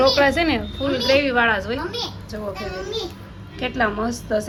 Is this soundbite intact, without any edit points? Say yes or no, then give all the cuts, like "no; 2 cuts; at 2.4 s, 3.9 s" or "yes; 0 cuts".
yes; 0 cuts